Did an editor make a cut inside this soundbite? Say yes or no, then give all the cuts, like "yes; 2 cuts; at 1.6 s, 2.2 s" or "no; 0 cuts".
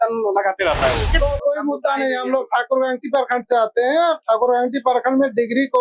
yes; 1 cut; at 1.1 s